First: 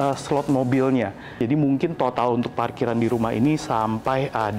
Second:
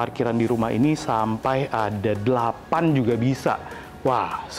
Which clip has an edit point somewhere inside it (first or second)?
first